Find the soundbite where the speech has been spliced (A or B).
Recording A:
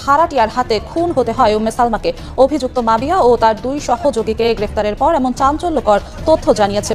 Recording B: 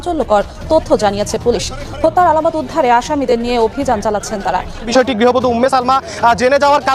B